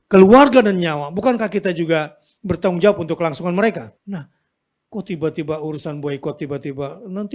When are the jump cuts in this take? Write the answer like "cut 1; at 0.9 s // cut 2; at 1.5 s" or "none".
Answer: cut 1; at 3.9 s